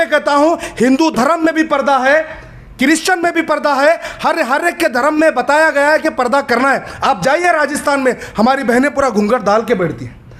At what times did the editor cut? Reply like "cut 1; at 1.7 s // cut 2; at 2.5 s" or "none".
none